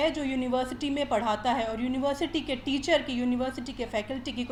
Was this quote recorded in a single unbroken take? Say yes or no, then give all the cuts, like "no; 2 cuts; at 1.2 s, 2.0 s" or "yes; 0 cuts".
yes; 0 cuts